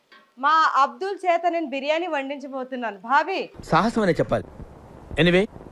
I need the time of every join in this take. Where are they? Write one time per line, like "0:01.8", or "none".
none